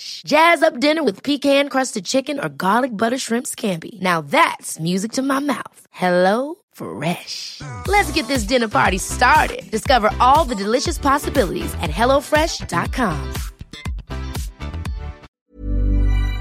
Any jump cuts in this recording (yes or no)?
yes